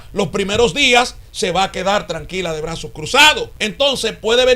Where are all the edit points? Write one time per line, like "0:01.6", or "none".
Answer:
0:03.6